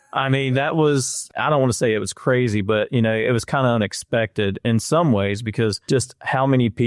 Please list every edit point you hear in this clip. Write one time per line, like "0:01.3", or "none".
0:01.2
0:04.6
0:05.8